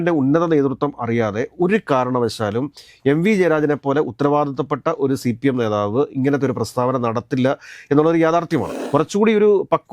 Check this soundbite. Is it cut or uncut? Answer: cut